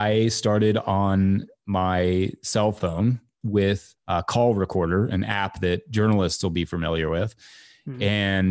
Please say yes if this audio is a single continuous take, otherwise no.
yes